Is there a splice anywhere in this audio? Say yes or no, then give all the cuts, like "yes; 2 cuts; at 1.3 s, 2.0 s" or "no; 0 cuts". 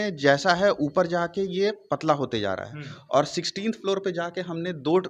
no; 0 cuts